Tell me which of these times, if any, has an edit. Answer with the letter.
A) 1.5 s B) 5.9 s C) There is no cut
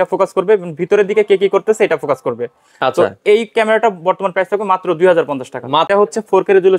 B